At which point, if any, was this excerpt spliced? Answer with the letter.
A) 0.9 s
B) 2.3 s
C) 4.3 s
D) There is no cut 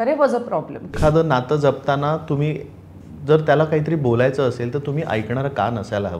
A